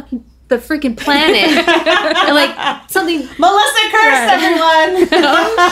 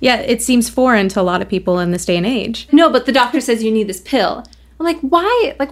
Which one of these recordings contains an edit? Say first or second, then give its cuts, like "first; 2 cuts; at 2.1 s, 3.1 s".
second; 1 cut; at 2.7 s